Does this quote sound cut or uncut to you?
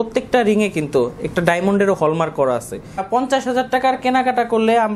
cut